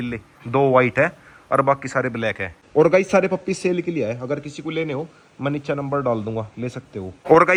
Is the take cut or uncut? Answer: uncut